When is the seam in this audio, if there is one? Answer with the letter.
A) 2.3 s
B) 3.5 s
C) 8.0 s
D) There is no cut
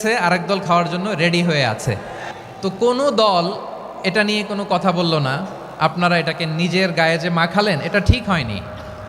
A